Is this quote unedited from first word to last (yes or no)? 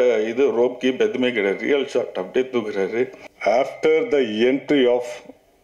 no